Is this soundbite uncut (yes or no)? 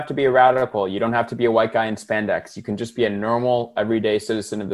yes